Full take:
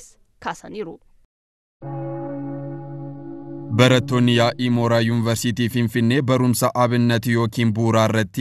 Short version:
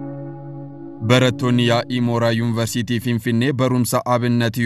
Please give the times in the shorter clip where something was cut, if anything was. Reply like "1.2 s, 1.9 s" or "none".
1.0 s